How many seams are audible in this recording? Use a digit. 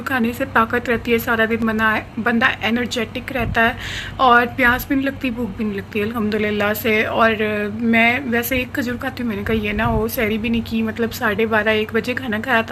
0